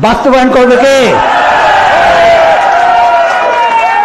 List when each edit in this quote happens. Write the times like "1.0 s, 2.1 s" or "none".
none